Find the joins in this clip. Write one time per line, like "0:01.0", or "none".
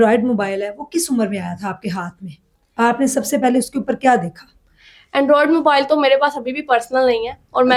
none